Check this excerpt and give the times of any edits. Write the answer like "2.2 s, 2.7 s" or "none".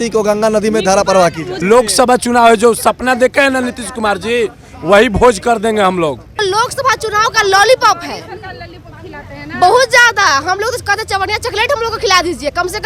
1.5 s, 6.4 s